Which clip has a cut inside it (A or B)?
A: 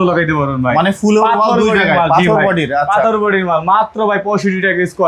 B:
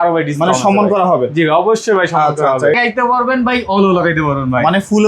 B